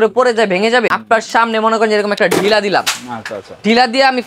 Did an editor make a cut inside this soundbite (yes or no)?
yes